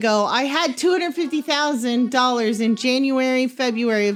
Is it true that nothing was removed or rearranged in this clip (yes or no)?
yes